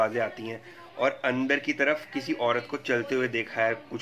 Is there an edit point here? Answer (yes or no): no